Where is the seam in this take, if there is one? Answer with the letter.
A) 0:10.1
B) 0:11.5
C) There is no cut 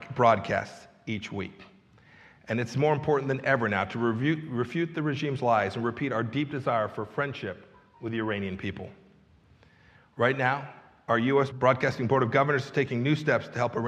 B